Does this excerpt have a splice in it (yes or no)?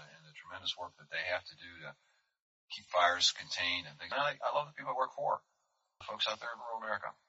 yes